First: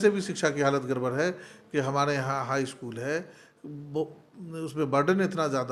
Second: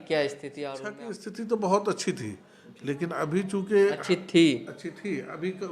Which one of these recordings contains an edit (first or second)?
second